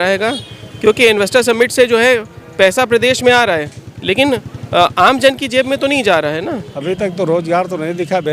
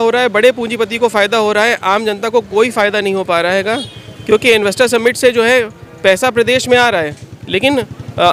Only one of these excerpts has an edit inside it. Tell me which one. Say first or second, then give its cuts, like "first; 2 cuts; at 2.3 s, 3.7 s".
first; 1 cut; at 6.7 s